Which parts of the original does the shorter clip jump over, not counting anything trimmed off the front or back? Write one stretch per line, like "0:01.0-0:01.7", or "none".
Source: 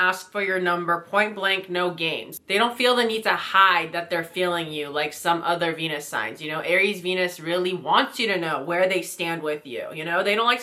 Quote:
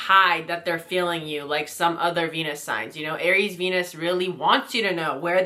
none